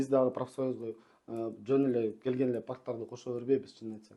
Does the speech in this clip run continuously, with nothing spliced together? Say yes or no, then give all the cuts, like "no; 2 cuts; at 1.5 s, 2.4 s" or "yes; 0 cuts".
yes; 0 cuts